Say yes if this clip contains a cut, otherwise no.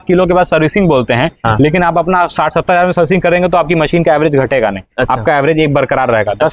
no